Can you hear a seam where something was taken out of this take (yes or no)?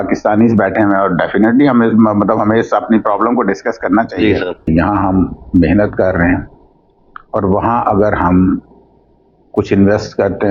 yes